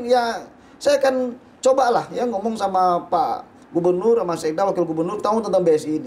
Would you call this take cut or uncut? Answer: uncut